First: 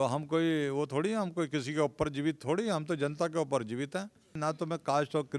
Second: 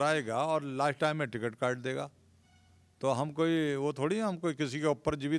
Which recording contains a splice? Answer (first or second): first